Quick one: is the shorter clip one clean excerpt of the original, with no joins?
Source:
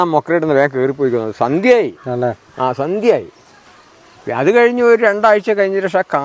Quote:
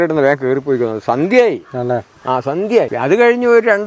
no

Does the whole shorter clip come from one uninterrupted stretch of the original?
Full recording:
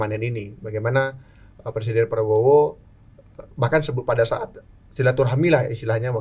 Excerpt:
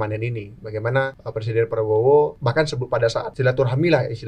no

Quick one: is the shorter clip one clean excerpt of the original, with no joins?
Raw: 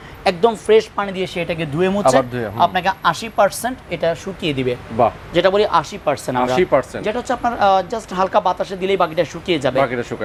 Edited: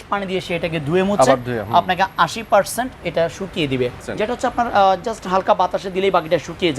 no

